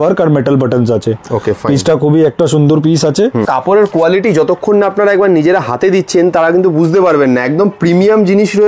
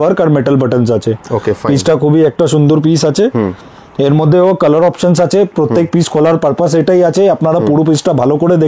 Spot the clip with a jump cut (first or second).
first